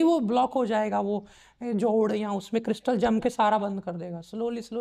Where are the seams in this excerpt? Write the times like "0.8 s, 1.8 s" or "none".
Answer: none